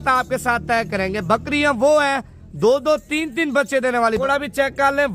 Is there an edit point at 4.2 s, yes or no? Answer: yes